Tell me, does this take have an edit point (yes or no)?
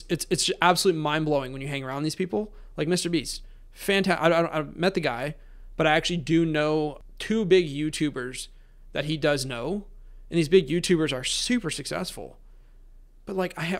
yes